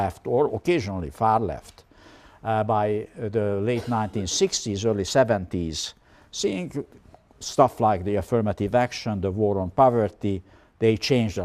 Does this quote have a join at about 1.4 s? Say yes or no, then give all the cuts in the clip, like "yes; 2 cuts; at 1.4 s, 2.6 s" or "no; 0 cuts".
no; 1 cut; at 3.5 s